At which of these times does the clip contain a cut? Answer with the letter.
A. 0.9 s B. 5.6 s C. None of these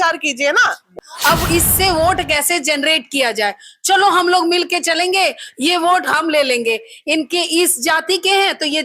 A